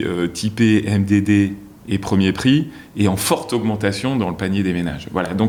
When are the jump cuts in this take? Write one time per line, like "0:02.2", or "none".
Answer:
none

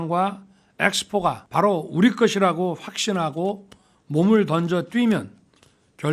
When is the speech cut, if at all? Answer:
0:01.4

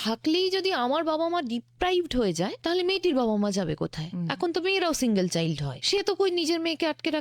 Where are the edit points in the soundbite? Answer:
0:02.6
0:05.7

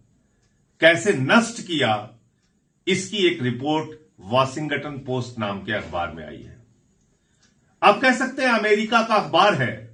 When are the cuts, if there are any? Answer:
none

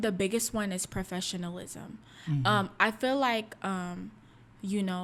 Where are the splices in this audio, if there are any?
none

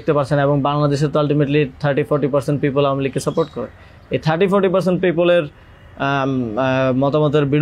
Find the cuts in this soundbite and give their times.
none

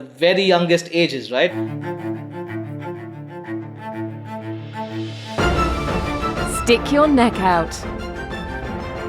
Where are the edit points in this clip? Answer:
0:01.5

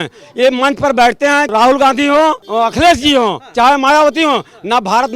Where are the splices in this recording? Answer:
0:01.5
0:02.4

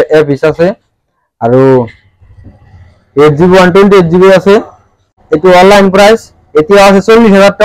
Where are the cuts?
none

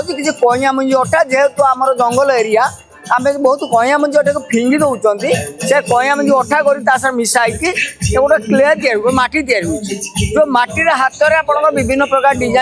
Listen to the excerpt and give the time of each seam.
none

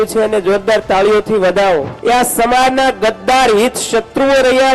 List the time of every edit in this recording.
0:01.9

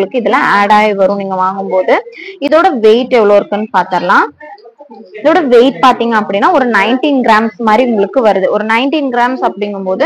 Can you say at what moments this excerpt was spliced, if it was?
none

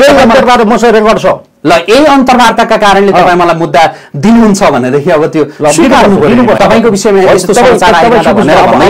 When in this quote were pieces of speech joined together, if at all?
0:06.6

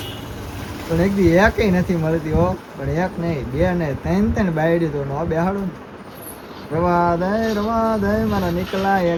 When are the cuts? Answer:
none

